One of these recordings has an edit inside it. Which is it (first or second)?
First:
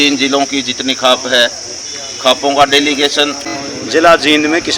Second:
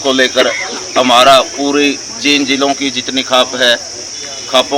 first